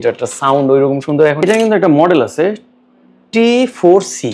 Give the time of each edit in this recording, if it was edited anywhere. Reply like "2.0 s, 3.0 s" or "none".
1.4 s